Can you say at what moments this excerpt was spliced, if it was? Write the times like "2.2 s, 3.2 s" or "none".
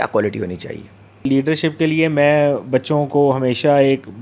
none